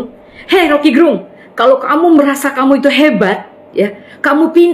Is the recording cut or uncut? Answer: uncut